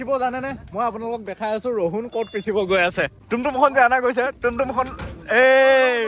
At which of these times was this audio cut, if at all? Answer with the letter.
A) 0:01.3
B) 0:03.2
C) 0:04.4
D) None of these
B